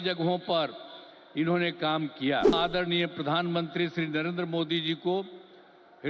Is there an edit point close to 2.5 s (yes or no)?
yes